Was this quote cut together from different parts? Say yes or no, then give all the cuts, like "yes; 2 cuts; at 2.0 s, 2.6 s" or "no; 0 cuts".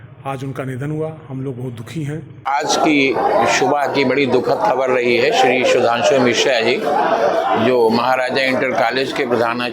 yes; 1 cut; at 2.5 s